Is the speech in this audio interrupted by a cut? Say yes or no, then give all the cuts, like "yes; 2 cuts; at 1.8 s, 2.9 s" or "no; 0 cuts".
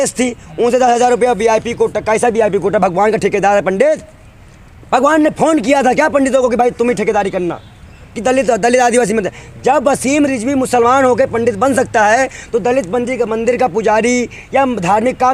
no; 0 cuts